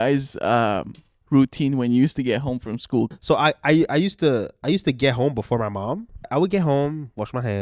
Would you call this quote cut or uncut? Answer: cut